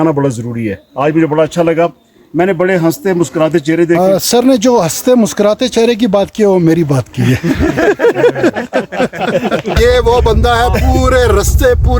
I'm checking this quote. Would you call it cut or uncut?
cut